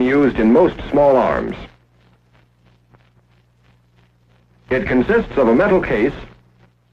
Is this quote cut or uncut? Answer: cut